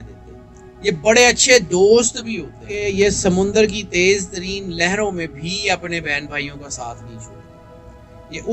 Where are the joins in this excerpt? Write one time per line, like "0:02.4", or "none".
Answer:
0:02.8